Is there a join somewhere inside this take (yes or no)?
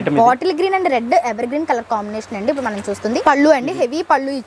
yes